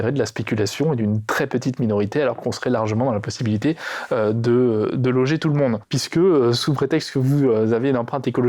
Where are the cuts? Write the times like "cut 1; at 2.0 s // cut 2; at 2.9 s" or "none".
cut 1; at 5.9 s